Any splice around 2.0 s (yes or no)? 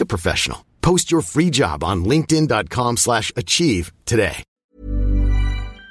no